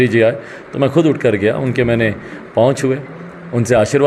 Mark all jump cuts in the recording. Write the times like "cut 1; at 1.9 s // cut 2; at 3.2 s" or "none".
none